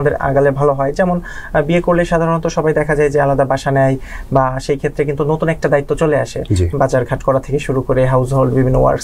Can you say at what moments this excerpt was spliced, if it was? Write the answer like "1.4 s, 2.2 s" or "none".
none